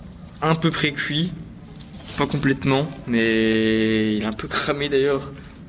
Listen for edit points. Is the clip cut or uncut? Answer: uncut